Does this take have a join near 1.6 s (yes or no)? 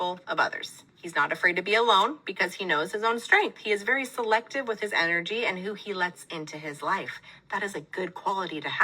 yes